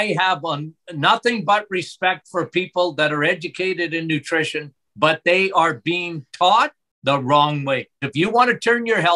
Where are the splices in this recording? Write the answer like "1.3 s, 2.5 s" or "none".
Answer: 6.9 s, 8.1 s